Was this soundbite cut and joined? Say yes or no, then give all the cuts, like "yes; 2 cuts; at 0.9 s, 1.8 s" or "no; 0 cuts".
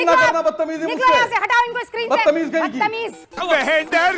no; 0 cuts